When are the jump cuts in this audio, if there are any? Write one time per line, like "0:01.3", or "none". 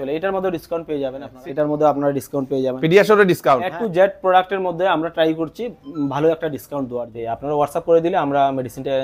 0:01.3
0:03.7
0:07.1